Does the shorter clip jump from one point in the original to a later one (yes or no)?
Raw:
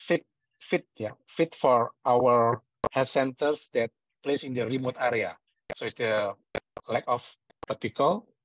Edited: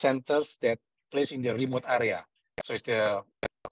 no